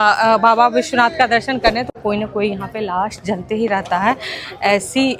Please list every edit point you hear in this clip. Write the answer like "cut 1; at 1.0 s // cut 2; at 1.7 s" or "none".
cut 1; at 1.9 s